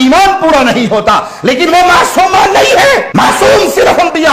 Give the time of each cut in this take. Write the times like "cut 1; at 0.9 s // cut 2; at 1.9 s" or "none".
cut 1; at 3.1 s